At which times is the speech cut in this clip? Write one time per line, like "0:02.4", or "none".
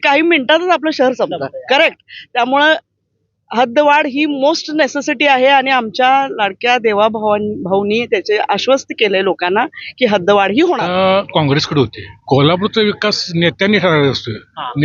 0:10.8
0:12.1